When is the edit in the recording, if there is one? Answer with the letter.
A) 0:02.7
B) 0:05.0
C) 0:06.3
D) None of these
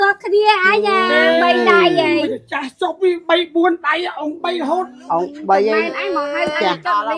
D